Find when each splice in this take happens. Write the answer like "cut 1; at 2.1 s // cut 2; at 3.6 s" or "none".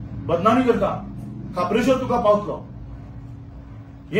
none